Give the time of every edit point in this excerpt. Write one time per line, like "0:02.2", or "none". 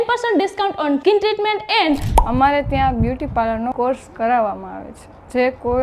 0:02.1